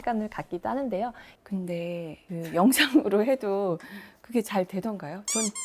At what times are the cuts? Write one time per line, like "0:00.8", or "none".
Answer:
0:01.3

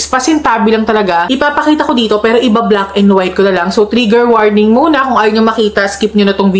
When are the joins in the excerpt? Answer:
none

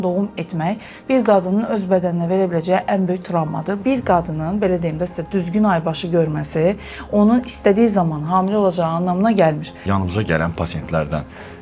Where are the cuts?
0:03.8
0:09.8

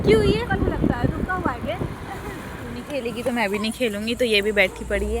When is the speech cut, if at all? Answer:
0:02.8

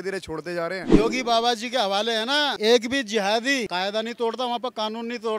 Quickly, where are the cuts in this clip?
0:00.9

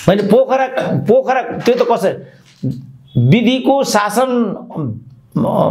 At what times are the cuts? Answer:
none

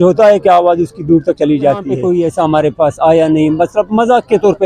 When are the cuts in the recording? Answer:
0:01.9

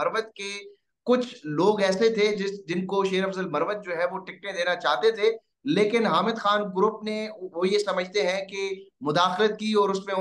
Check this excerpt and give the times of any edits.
none

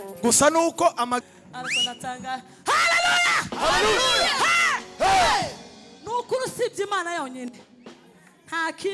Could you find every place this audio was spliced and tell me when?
0:01.2

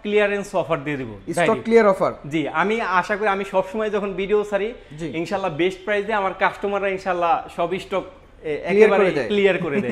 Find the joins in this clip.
none

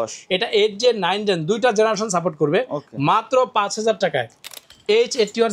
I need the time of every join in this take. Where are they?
0:04.5

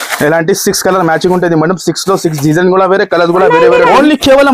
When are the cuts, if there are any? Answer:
0:03.5

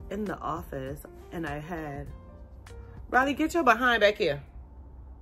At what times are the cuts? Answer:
none

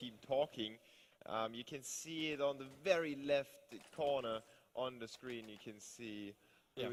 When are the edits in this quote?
none

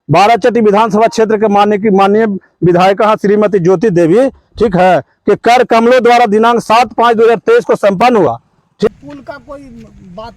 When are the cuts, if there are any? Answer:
0:08.9

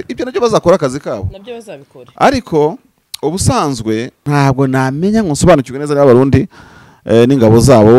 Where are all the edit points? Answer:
0:04.1

